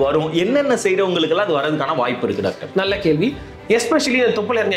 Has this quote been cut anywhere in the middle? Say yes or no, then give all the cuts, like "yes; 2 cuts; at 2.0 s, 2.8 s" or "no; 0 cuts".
yes; 1 cut; at 3.5 s